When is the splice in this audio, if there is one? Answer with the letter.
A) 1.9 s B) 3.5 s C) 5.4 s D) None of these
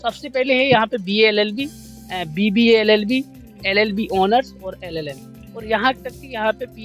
D